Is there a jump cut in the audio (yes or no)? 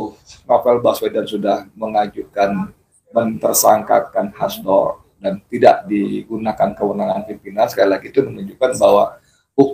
no